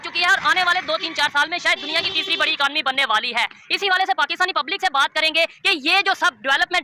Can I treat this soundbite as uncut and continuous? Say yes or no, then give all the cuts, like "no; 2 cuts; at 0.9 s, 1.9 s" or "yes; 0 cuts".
yes; 0 cuts